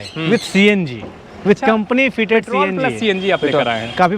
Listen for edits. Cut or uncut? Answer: uncut